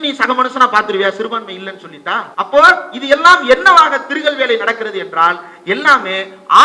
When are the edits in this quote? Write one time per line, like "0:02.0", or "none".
0:02.3

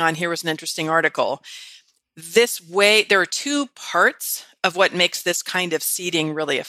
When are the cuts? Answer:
none

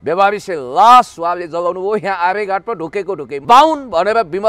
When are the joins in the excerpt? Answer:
0:03.2

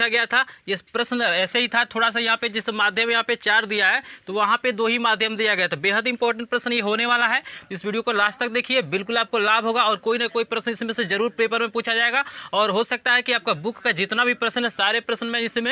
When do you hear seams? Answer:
none

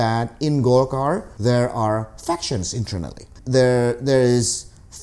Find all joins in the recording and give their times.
0:01.3

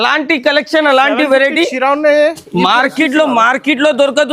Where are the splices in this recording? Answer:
none

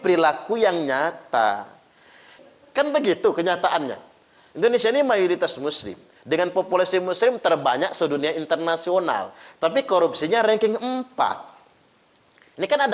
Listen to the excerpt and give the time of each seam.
0:02.5

